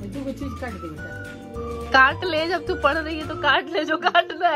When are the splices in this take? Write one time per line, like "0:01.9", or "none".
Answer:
none